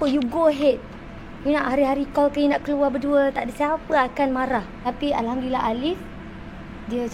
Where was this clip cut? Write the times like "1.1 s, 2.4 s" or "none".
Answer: 4.7 s